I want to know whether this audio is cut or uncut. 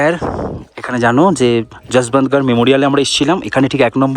uncut